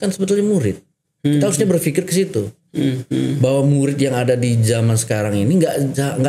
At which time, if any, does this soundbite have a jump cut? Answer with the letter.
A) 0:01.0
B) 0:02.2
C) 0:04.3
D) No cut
D